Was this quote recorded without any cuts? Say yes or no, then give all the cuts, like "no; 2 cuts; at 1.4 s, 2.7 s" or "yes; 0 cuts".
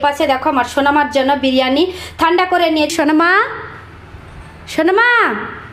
no; 1 cut; at 2.9 s